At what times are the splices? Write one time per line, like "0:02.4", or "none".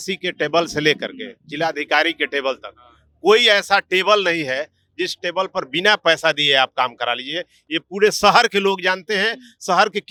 none